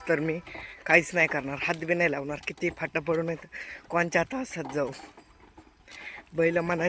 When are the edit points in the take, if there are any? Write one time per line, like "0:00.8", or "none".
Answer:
none